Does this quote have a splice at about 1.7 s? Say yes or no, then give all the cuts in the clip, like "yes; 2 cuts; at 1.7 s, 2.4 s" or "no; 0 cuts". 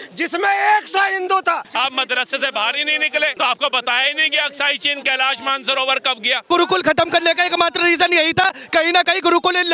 yes; 3 cuts; at 1.7 s, 3.3 s, 6.4 s